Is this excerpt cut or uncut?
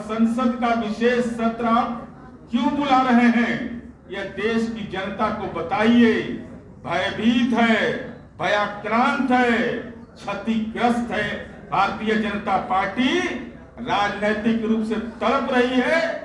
uncut